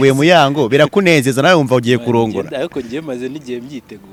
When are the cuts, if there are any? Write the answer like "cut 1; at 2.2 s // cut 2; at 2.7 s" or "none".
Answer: none